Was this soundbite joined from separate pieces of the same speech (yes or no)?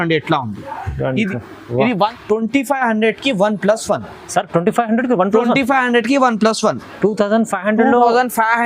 yes